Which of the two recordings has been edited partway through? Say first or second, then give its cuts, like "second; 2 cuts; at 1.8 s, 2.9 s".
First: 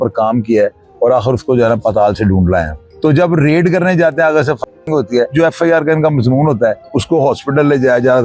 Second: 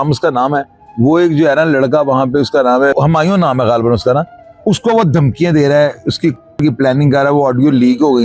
first; 3 cuts; at 2.9 s, 5.3 s, 6.8 s